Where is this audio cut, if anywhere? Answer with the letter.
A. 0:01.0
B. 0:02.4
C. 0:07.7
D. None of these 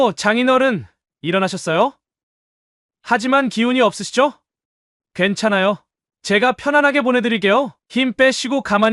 D